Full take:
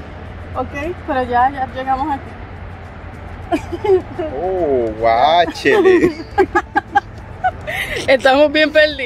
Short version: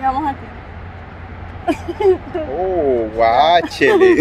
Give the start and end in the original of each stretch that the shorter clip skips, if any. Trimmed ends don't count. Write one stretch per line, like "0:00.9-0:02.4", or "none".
none